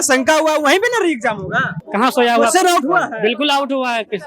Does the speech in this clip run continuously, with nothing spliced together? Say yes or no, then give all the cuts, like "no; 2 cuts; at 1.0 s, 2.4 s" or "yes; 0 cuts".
no; 1 cut; at 1.8 s